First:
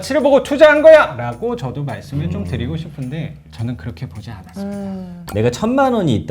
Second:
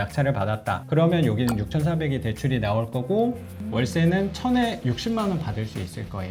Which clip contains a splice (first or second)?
first